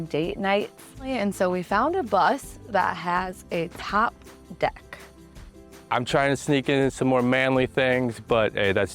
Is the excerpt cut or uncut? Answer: cut